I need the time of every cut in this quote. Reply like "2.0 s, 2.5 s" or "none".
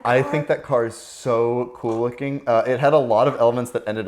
none